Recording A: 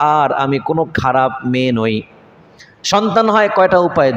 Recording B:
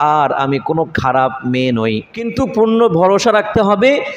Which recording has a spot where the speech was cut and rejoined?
B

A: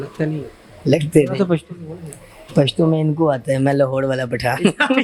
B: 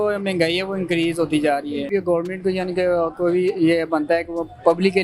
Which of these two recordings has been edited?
B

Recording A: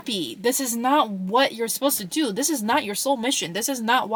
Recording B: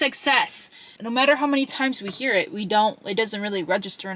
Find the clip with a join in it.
B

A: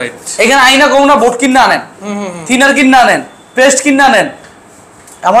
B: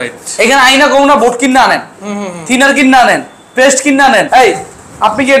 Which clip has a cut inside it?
B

